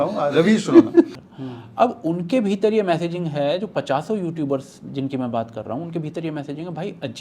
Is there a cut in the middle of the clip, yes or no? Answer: yes